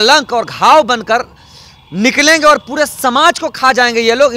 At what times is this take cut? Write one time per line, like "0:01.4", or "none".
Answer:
none